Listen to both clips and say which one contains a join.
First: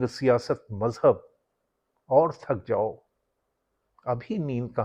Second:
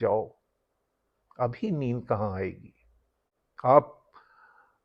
second; 1 cut; at 3.5 s

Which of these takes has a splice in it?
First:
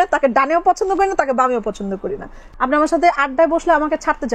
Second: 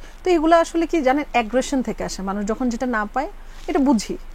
first; 1 cut; at 2.4 s

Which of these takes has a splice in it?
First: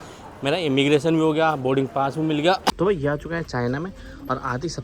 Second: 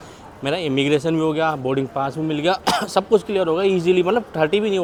first; 1 cut; at 2.7 s

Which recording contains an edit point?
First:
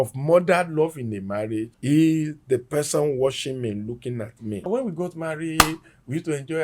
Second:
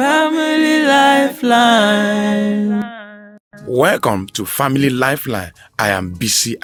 first; 2 cuts; at 1.7 s, 4.7 s

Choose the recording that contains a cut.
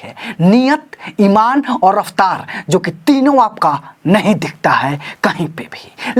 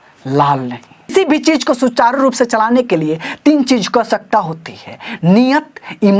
second; 1 cut; at 1.1 s

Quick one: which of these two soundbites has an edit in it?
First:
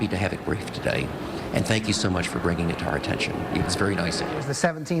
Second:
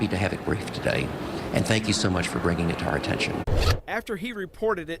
second; 1 cut; at 3.4 s

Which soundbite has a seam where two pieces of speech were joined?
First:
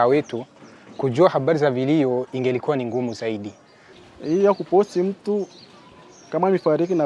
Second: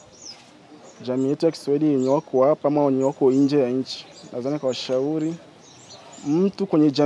first; 1 cut; at 4.0 s

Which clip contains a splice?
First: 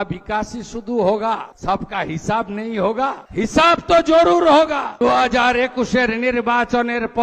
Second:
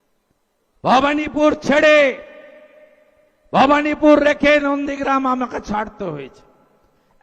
first; 3 cuts; at 1.5 s, 3.2 s, 5.0 s

